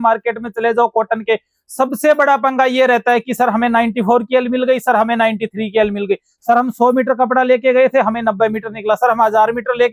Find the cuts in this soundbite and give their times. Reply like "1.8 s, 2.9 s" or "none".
none